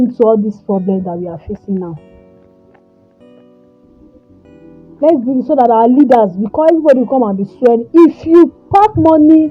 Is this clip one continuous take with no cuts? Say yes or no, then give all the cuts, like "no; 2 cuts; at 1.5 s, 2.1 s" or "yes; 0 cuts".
yes; 0 cuts